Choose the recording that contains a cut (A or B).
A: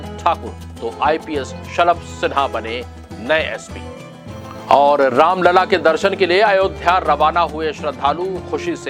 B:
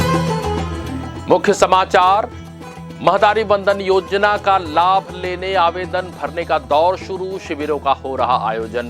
B